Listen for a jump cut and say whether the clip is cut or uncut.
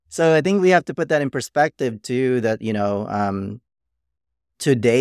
uncut